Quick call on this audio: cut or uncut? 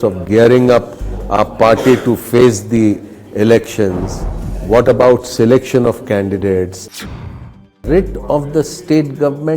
cut